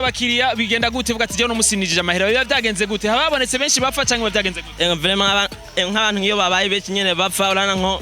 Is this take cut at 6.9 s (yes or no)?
no